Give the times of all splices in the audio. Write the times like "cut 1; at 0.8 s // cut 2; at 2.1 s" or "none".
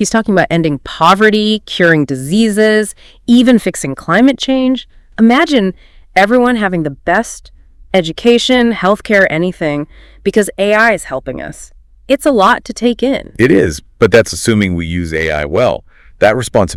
none